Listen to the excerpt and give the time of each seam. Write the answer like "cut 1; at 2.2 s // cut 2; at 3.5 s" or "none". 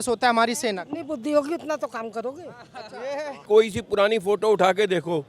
cut 1; at 3.3 s